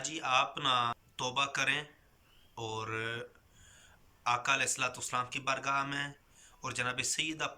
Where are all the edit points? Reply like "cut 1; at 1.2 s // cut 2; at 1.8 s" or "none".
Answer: cut 1; at 1.1 s